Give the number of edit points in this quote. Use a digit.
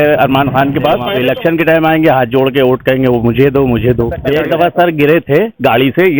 2